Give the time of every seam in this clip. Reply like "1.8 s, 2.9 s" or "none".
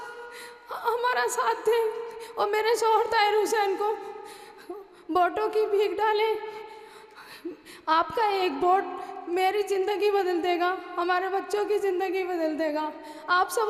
none

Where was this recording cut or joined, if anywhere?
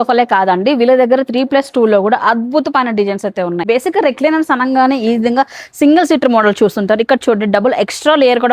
3.6 s

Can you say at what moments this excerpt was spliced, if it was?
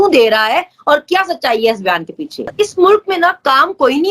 2.5 s

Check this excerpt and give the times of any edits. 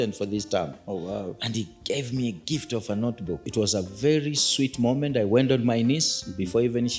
3.5 s

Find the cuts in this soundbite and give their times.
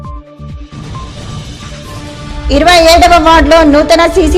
1.3 s

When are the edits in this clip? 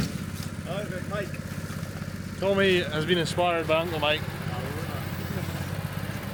none

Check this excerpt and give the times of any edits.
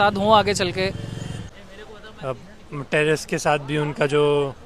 1.4 s

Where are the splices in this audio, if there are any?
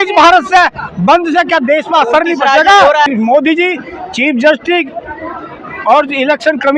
3.1 s

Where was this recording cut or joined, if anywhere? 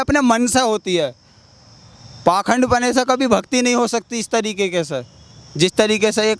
none

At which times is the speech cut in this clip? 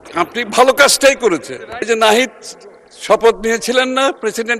1.9 s

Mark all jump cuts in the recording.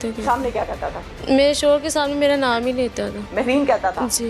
1.1 s

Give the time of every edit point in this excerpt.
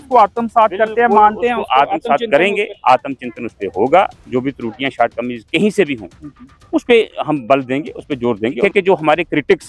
8.6 s

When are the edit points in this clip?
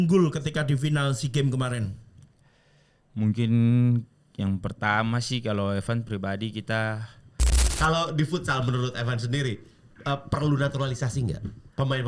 7.6 s

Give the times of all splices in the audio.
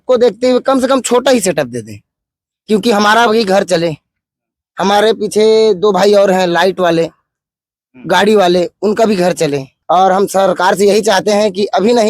9.7 s

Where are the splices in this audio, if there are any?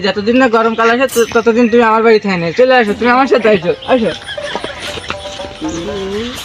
none

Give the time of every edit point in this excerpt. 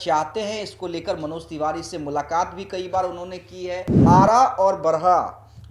4.0 s

